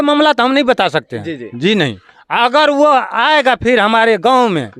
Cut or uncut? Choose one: uncut